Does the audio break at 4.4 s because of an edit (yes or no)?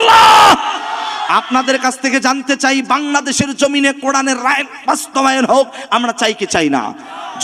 no